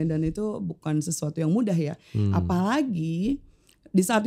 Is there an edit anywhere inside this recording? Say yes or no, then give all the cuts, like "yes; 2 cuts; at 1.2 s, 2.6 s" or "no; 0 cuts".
no; 0 cuts